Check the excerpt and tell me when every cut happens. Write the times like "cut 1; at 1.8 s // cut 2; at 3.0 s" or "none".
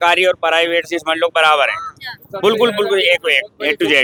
none